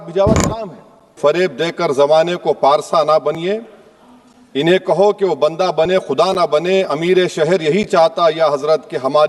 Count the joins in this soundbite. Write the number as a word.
one